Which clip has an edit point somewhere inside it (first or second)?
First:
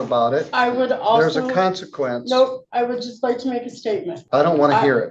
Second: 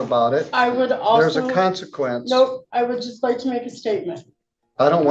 first